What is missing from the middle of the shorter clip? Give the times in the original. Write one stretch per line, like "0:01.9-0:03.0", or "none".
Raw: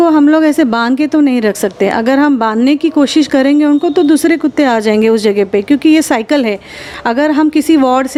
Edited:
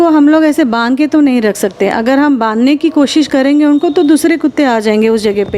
none